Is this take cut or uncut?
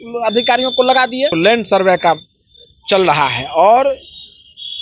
cut